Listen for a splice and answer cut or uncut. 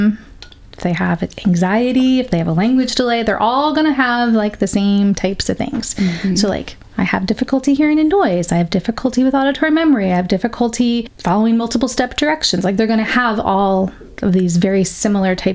cut